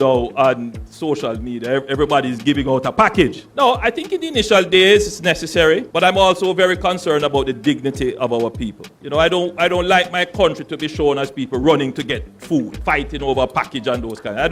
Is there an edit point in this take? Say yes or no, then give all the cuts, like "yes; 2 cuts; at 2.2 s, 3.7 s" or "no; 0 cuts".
no; 0 cuts